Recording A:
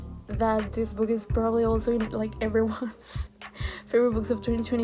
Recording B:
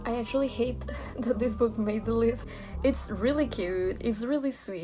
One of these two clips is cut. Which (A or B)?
B